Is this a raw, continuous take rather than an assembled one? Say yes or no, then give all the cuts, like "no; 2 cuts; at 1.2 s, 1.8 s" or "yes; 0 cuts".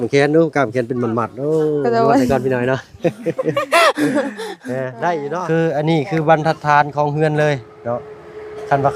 no; 1 cut; at 5.3 s